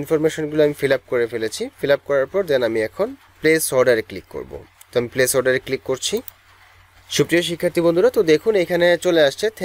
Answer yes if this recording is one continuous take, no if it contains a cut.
yes